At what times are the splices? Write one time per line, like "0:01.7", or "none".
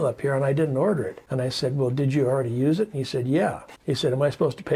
0:01.2
0:03.7